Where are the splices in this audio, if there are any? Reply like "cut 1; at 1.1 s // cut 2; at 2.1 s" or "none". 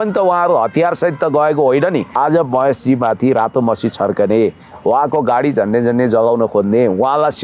cut 1; at 2.1 s